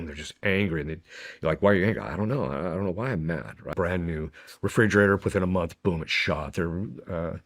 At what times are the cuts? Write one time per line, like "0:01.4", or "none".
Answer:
0:03.7

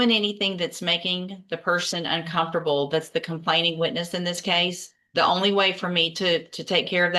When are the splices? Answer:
none

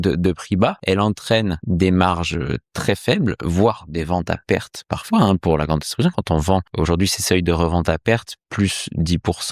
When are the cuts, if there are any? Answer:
0:00.8
0:01.6
0:06.7

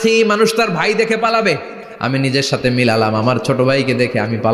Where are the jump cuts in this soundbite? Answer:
0:02.1

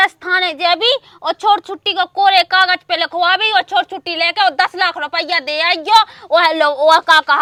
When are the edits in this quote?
none

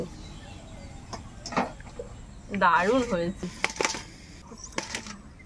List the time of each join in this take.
0:03.4
0:04.5

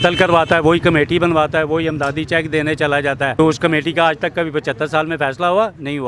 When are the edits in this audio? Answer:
0:03.3

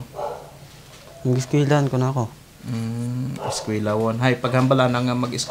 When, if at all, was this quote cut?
none

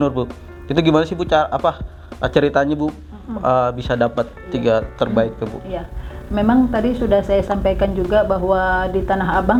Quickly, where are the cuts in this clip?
none

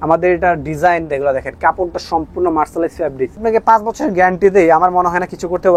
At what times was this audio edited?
0:03.3

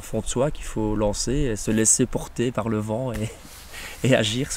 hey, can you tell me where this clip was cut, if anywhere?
none

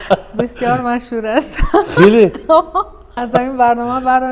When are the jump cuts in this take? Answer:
0:03.2

